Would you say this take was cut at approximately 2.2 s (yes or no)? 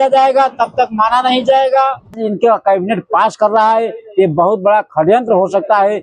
yes